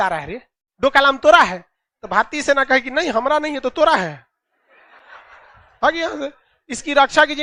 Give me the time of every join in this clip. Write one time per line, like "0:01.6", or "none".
none